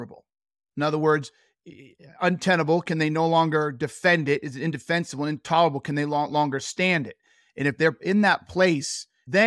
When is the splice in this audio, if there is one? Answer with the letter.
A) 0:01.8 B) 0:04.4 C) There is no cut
C